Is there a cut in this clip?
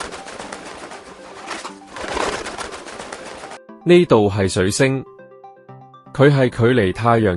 no; 0 cuts

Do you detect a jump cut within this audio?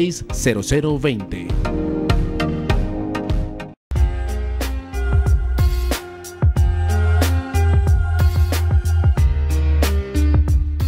yes; 1 cut; at 3.8 s

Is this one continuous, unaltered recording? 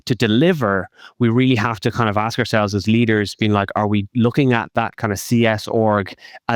yes; 0 cuts

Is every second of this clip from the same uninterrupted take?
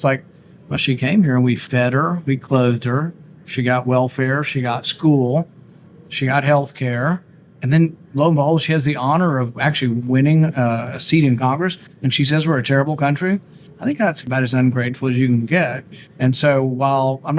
no; 1 cut; at 11.3 s

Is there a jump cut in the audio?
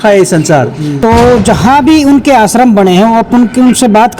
yes; 1 cut; at 0.9 s

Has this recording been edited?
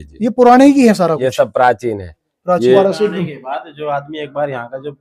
yes; 1 cut; at 2.8 s

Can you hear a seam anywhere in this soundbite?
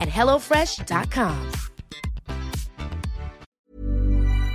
yes; 1 cut; at 3.6 s

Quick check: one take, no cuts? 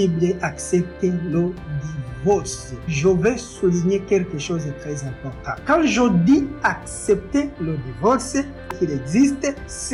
yes; 0 cuts

